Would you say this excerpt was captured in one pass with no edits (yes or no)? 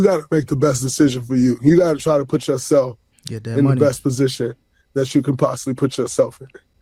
yes